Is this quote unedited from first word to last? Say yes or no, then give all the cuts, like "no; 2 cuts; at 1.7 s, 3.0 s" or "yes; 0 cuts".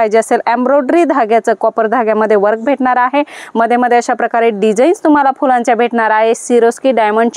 yes; 0 cuts